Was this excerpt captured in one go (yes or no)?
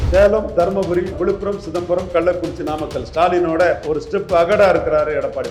no